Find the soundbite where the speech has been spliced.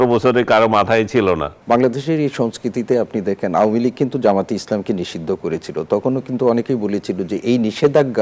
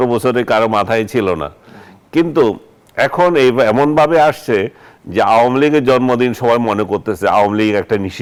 first; 1 cut; at 1.5 s

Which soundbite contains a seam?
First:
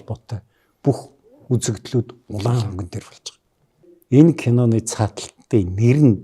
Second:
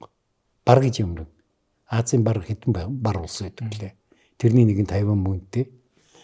first; 1 cut; at 3.9 s

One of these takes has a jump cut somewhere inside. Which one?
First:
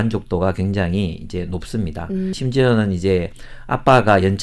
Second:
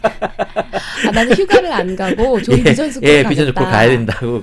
first; 1 cut; at 2.3 s

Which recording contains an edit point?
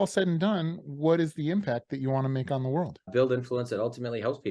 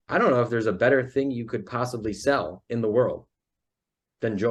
first; 1 cut; at 3.1 s

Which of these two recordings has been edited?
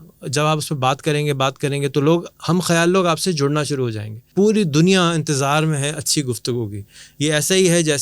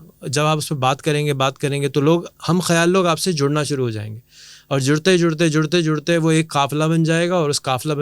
first; 1 cut; at 4.2 s

